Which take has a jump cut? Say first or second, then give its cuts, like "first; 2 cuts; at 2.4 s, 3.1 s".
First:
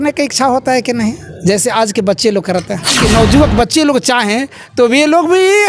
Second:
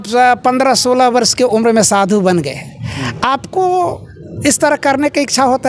first; 1 cut; at 3.0 s